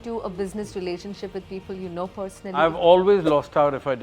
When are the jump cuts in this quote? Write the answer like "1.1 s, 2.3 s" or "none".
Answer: 2.6 s